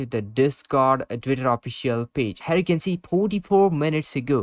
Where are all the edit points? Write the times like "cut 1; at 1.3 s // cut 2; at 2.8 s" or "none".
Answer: cut 1; at 2.4 s